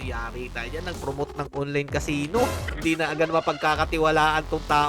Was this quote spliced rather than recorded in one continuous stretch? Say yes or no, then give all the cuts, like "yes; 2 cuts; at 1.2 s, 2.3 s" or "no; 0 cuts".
yes; 1 cut; at 2.7 s